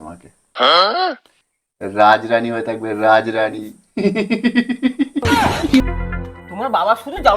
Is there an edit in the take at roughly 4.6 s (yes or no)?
no